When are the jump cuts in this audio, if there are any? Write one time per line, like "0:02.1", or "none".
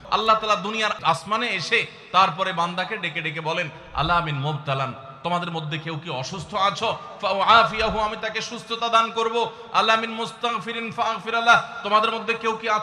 0:01.0